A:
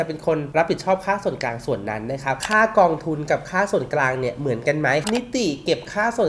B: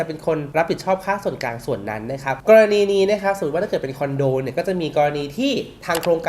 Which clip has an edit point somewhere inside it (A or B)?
A